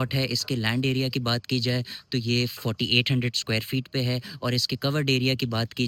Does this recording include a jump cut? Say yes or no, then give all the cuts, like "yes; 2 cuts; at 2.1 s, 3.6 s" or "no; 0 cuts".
no; 0 cuts